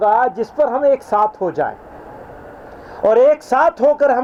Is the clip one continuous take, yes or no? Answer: yes